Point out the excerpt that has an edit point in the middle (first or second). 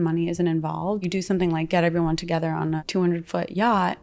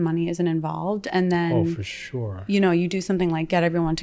first